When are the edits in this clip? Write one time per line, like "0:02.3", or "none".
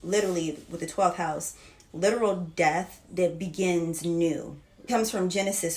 0:04.8